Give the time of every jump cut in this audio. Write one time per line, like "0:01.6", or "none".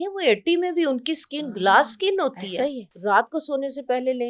0:02.9